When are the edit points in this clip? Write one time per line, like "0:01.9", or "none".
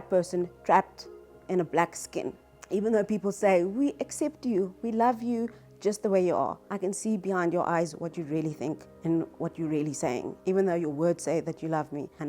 none